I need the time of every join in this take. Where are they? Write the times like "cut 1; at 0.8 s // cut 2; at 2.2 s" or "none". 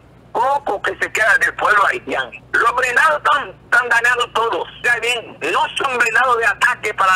cut 1; at 2.4 s // cut 2; at 4.9 s